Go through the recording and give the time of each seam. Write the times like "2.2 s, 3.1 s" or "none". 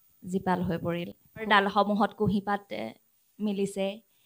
1.5 s